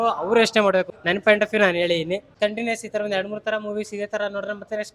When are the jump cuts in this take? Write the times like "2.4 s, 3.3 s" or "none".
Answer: 0.9 s, 2.3 s